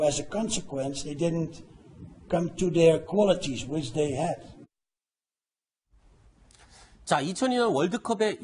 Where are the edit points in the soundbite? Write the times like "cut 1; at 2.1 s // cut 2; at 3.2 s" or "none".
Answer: none